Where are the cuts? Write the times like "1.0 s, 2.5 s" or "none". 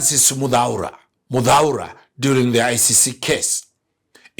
none